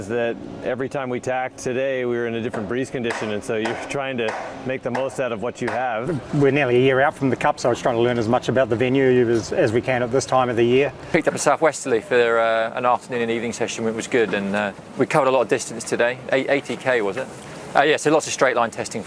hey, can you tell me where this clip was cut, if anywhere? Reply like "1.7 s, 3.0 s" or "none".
6.2 s, 11.0 s, 14.8 s, 17.3 s